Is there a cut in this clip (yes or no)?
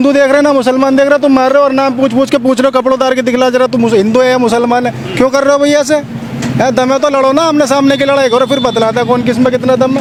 no